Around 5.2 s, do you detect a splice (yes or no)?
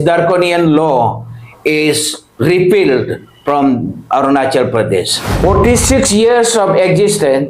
yes